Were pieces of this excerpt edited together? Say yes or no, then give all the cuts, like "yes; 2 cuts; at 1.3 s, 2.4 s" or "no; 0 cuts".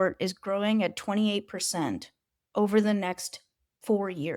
no; 0 cuts